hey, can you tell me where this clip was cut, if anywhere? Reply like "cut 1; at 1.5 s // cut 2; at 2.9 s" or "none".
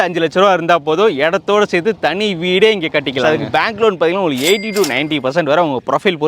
cut 1; at 3.2 s